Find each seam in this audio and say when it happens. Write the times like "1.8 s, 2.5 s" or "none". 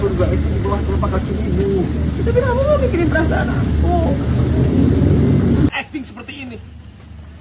5.7 s

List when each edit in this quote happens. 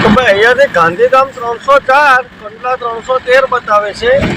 none

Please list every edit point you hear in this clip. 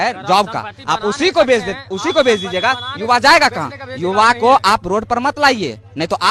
none

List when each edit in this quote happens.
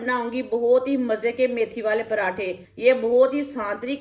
2.6 s

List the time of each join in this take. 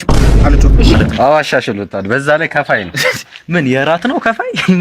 0.9 s

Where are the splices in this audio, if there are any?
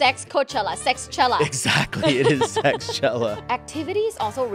3.4 s

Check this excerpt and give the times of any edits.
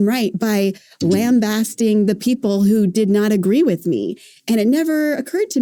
none

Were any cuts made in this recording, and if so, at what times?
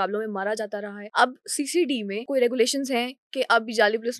1.0 s, 2.2 s

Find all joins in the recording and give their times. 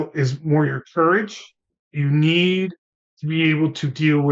none

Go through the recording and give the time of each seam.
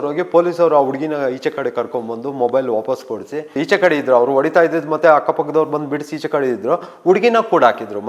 3.6 s

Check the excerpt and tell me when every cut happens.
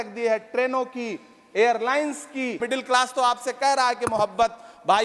2.6 s

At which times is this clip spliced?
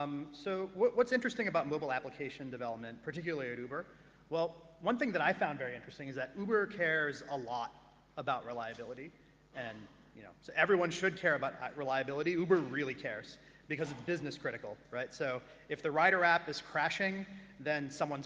11.2 s

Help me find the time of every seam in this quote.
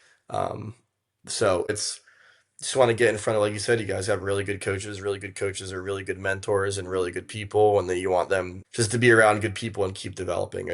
1.7 s, 8.6 s

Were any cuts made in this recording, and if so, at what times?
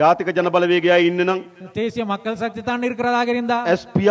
none

